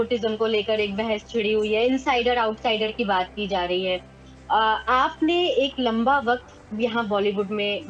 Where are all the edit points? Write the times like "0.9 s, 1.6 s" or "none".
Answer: none